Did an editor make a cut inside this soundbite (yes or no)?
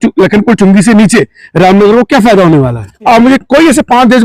yes